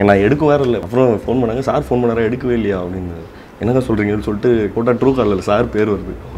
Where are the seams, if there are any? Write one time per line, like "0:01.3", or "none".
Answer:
0:00.8
0:04.7